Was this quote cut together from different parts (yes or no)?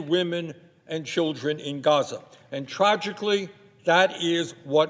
no